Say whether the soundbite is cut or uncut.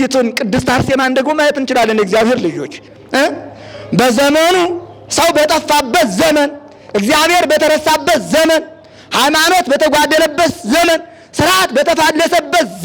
uncut